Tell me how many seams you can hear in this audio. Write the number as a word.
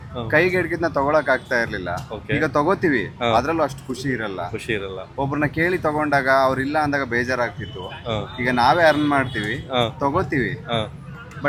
zero